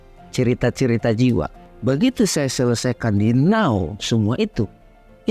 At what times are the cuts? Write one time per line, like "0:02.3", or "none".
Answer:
0:01.6